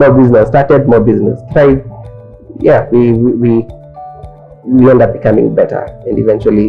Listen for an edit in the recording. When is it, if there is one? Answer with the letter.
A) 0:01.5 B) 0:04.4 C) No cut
C